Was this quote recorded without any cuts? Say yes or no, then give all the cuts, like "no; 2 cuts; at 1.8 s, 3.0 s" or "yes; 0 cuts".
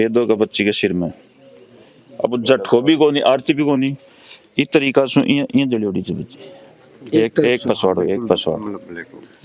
yes; 0 cuts